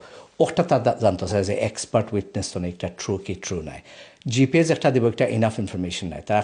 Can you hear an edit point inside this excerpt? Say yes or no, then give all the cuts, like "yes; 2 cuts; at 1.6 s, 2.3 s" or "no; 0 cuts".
no; 0 cuts